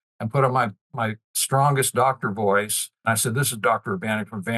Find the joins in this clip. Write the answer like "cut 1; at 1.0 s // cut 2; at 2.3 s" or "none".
cut 1; at 3.1 s